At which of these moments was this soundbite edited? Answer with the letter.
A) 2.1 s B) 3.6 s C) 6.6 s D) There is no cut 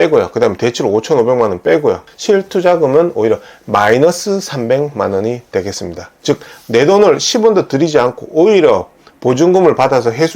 A